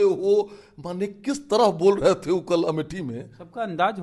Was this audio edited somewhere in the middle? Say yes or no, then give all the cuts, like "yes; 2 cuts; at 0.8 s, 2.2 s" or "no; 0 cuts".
no; 0 cuts